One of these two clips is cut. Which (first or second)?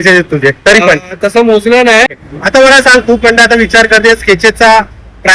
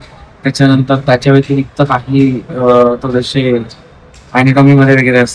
first